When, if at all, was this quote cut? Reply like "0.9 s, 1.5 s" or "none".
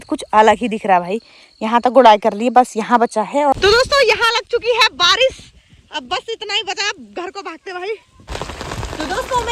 3.5 s, 8.2 s

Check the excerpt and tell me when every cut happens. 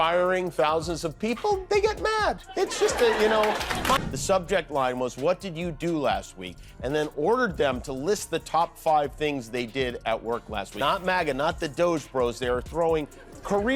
4.1 s, 10.7 s

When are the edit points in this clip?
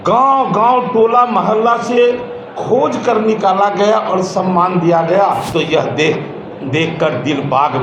5.5 s

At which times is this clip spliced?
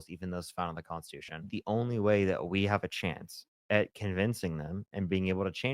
1.4 s

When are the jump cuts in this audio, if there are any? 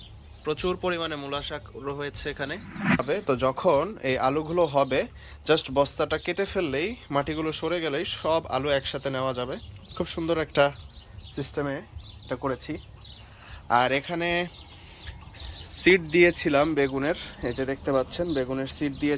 3.0 s

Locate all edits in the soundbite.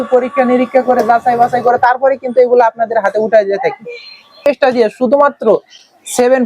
4.5 s

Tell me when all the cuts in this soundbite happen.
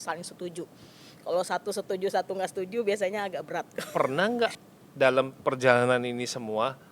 3.8 s

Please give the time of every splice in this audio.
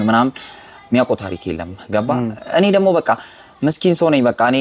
none

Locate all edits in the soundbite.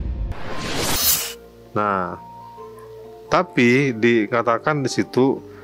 1.2 s

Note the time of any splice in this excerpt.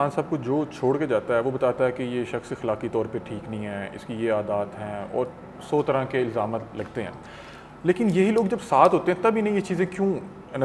none

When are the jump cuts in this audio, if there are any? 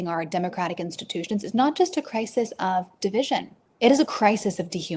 3.6 s

